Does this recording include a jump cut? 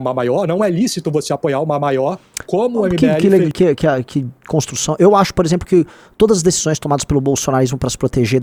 no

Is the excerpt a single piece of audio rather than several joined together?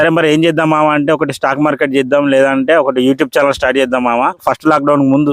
no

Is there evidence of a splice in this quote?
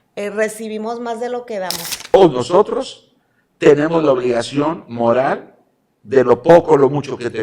yes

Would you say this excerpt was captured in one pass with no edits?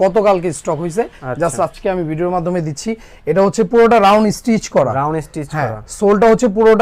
yes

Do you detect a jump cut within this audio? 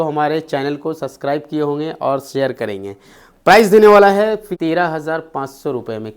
yes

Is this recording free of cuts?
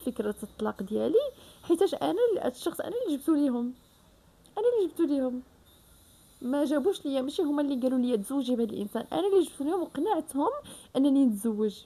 yes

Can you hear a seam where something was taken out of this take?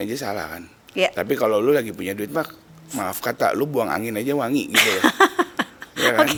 no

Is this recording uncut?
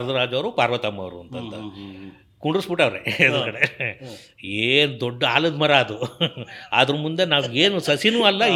yes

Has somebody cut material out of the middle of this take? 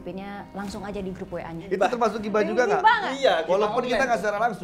yes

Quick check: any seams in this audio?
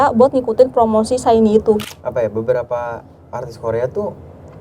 yes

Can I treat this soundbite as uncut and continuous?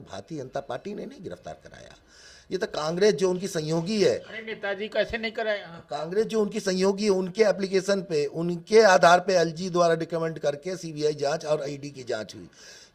yes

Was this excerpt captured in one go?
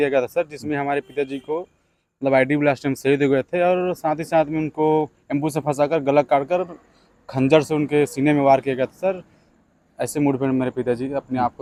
yes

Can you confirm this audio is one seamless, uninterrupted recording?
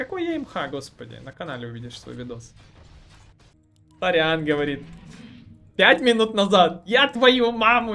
no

